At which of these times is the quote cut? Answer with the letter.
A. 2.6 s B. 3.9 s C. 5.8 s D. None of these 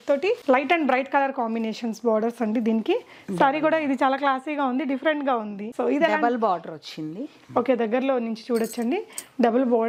D